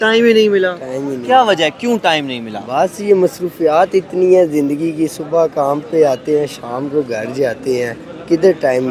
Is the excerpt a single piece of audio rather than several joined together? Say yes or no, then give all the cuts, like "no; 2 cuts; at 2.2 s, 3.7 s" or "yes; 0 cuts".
yes; 0 cuts